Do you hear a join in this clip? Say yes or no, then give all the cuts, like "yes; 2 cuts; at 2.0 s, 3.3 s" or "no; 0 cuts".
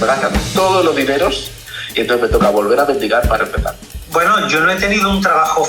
yes; 1 cut; at 3.8 s